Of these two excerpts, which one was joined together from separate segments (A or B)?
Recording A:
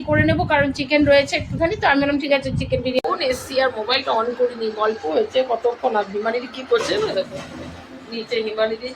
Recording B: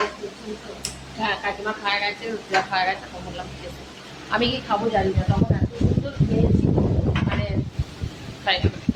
A